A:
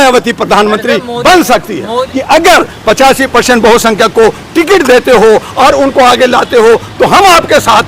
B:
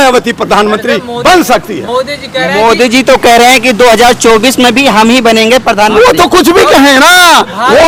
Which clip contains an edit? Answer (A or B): A